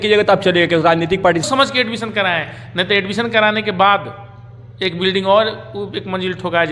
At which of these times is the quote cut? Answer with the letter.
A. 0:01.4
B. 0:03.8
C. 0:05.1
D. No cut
A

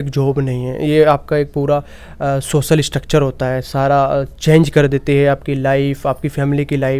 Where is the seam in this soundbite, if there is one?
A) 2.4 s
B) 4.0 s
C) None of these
C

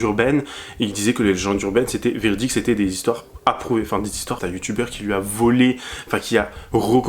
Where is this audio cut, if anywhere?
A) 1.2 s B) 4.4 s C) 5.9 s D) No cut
B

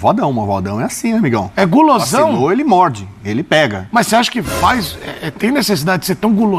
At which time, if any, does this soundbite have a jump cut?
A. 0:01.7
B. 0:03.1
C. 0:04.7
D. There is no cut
D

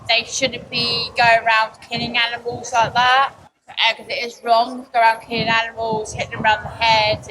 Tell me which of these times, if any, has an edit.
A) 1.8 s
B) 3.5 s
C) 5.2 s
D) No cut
B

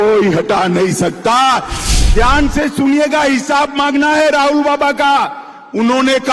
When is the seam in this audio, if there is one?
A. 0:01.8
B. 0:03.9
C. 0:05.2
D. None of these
A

